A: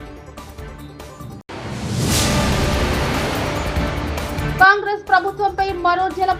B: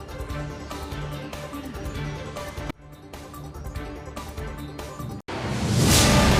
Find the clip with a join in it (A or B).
A